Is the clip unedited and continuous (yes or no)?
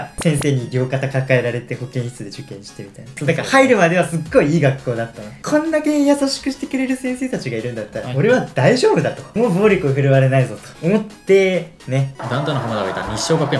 no